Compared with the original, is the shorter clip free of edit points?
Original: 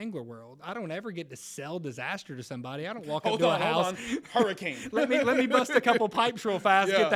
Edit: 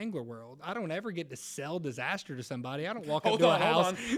yes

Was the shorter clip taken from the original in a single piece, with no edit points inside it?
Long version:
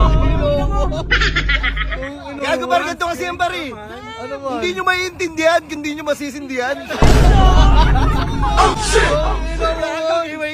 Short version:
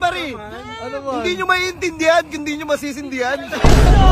yes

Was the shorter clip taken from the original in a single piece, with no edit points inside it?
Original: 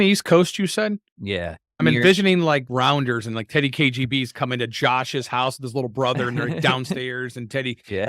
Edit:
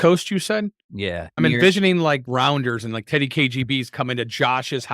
no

